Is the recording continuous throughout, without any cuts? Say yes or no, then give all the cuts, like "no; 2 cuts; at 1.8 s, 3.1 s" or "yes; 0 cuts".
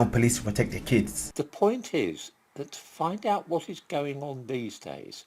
no; 1 cut; at 1.2 s